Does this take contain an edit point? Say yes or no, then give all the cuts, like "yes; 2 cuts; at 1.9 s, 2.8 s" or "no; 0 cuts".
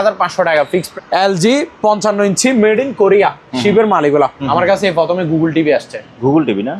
yes; 2 cuts; at 0.9 s, 4.4 s